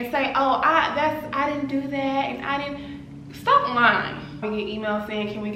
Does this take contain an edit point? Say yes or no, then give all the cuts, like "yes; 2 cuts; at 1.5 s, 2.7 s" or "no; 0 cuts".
yes; 1 cut; at 4.4 s